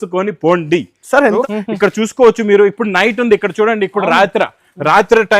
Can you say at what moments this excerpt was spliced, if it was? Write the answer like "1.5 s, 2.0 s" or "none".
1.4 s